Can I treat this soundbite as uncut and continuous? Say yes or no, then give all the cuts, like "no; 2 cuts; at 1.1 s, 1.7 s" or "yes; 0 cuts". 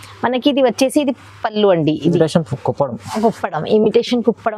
no; 1 cut; at 2.2 s